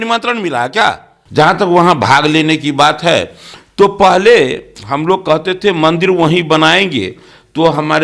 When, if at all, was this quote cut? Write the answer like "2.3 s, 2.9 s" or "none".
1.1 s